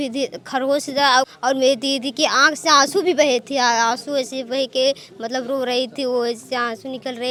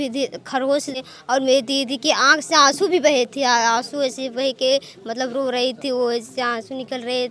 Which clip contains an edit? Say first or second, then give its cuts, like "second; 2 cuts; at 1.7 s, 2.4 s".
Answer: second; 1 cut; at 1.0 s